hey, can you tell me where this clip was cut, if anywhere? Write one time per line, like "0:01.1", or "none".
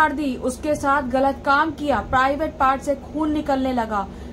none